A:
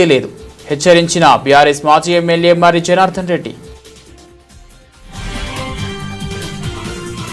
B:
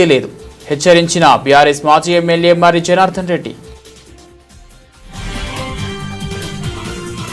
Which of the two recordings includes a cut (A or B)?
B